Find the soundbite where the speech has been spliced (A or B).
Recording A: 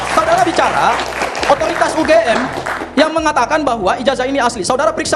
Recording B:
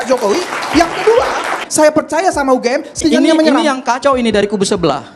B